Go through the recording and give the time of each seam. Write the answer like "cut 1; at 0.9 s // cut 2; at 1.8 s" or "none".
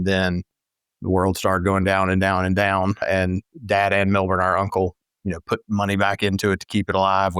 cut 1; at 3.0 s